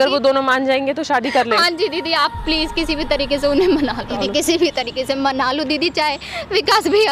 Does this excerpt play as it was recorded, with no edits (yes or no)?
no